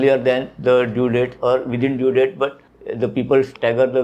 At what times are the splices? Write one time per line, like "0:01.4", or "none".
none